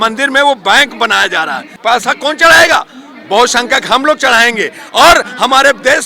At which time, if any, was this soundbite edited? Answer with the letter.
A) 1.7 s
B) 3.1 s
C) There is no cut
A